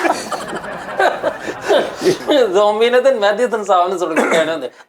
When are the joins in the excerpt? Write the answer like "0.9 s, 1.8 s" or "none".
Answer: 2.2 s